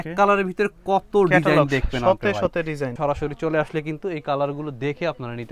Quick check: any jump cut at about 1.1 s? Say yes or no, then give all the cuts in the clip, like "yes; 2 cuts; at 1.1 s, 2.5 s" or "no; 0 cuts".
no; 1 cut; at 2.9 s